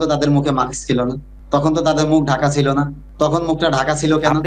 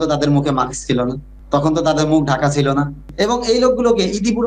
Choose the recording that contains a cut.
second; 1 cut; at 3.1 s

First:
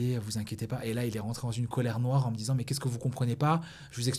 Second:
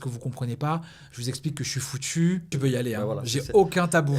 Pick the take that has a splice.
second; 1 cut; at 2.5 s

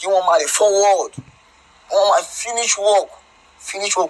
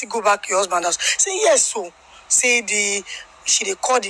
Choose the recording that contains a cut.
first; 1 cut; at 2.1 s

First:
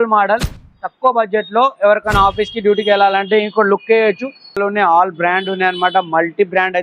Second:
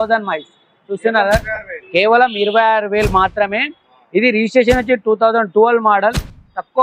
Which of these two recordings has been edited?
first; 1 cut; at 4.6 s

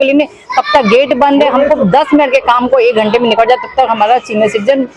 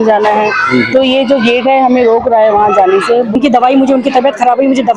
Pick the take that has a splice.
second; 1 cut; at 3.3 s

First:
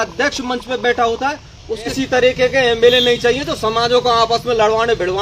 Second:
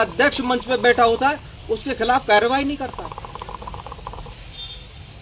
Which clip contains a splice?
first; 1 cut; at 1.9 s

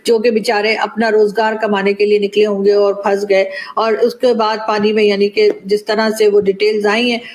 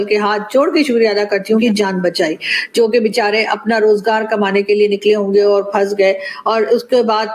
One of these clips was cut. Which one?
second; 1 cut; at 1.6 s

